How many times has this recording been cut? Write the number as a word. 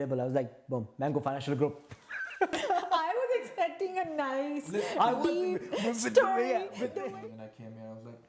two